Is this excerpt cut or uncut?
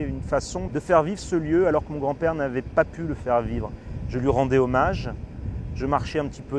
uncut